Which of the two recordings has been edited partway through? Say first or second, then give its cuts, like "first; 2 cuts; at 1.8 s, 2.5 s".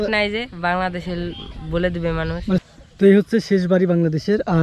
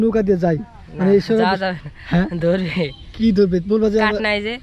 first; 1 cut; at 2.6 s